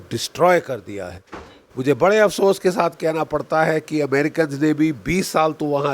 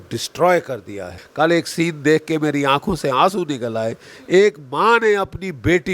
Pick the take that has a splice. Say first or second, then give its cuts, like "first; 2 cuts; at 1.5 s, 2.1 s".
second; 1 cut; at 1.2 s